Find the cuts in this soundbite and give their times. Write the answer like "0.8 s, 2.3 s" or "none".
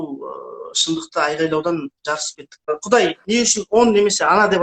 2.7 s